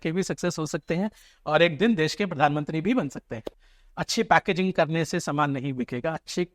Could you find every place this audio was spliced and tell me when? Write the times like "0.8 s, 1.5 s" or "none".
3.6 s